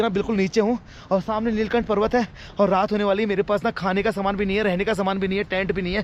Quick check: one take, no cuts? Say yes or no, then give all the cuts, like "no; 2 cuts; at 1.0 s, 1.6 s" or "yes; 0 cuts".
yes; 0 cuts